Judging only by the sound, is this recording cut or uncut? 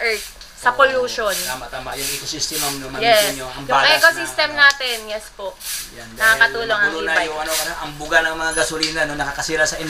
uncut